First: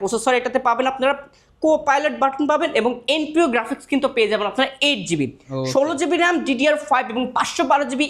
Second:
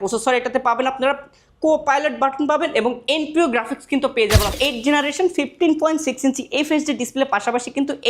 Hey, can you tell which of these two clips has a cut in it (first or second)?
second